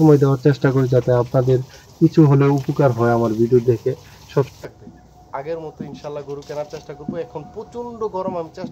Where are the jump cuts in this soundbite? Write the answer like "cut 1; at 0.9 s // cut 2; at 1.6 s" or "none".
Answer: cut 1; at 4.5 s